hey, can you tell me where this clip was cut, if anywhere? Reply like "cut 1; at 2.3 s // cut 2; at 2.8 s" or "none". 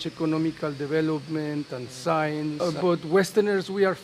cut 1; at 2.6 s

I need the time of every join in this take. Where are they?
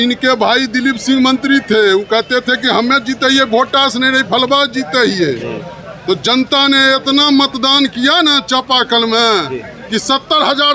none

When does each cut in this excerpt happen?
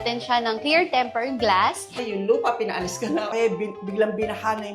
cut 1; at 2.0 s // cut 2; at 3.3 s

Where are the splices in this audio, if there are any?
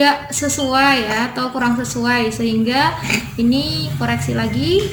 none

